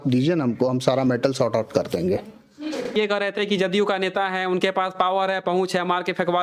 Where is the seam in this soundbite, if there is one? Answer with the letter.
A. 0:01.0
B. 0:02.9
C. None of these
B